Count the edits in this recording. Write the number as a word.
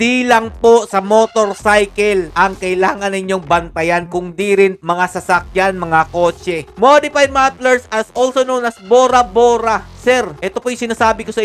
one